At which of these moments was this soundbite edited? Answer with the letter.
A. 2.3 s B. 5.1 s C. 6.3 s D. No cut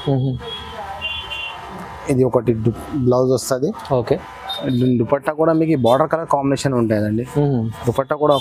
D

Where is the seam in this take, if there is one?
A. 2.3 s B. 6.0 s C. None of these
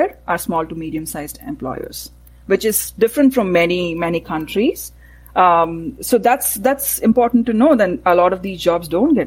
C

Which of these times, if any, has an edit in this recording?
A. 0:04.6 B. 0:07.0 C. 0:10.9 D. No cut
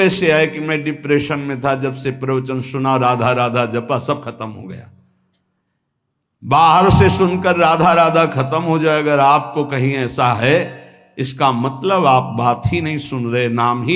D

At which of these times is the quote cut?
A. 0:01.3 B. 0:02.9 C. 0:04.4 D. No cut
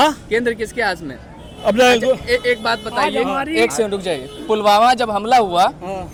D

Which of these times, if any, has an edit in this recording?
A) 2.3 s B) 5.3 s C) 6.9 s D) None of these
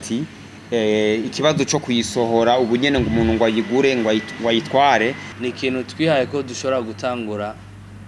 B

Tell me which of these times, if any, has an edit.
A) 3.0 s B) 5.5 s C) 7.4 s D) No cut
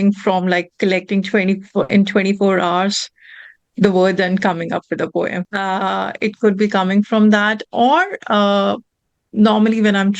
B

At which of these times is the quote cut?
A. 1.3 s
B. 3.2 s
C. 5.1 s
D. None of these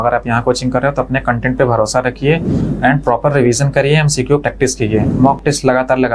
C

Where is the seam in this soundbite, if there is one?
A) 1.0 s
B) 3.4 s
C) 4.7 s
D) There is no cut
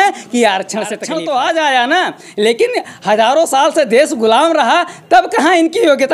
A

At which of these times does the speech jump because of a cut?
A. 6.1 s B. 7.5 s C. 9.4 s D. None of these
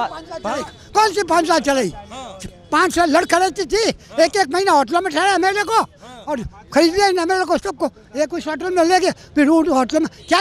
D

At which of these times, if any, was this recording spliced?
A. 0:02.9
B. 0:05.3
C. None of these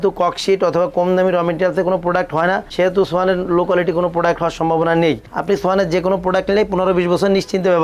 C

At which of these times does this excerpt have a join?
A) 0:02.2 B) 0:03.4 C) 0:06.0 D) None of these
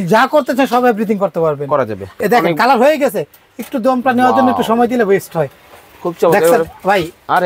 A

